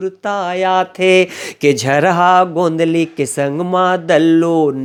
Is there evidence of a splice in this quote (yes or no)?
no